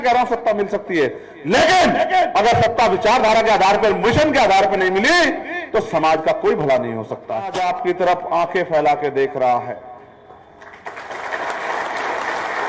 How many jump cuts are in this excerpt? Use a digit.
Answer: 1